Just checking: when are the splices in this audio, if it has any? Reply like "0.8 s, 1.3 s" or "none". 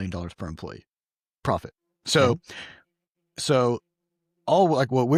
none